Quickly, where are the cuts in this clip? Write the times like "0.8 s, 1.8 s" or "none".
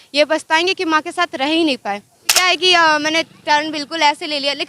2.3 s